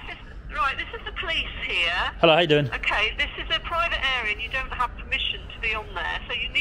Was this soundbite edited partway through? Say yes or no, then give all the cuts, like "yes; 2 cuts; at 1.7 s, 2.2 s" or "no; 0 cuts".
no; 0 cuts